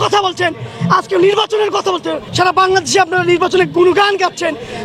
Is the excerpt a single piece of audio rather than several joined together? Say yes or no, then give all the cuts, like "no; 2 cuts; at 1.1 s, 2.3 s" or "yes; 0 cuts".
no; 1 cut; at 2.2 s